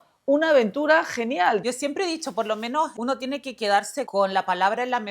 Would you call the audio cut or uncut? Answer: cut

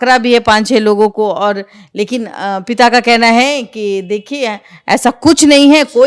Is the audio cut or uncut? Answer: uncut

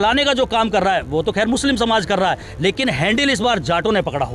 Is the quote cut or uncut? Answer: uncut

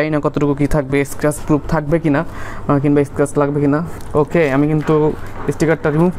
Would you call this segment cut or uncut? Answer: cut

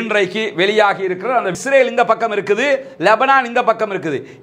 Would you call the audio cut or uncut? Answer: cut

